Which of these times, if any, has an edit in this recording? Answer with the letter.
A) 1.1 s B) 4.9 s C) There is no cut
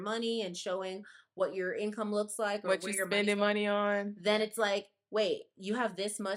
C